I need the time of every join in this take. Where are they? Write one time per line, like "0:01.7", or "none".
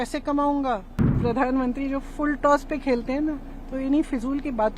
0:01.2